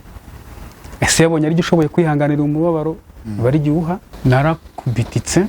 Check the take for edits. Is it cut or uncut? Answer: cut